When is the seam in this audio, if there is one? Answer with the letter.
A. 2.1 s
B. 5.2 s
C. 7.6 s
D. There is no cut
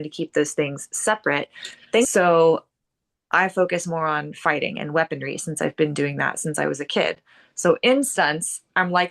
A